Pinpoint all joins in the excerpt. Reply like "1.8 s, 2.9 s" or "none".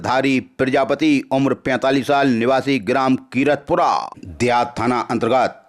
4.2 s